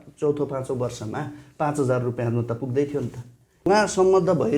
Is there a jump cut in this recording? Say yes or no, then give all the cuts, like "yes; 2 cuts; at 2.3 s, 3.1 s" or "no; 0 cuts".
yes; 1 cut; at 3.6 s